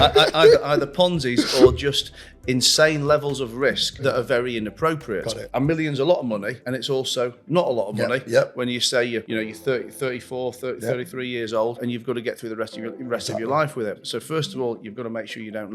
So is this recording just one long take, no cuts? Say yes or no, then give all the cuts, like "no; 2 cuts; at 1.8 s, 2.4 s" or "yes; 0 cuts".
no; 6 cuts; at 4.0 s, 5.4 s, 6.6 s, 9.3 s, 11.8 s, 14.0 s